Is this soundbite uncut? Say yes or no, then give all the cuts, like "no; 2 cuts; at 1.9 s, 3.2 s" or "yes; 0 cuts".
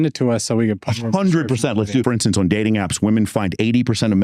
no; 1 cut; at 2.0 s